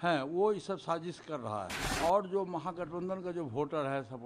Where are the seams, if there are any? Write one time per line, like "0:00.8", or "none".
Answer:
0:01.8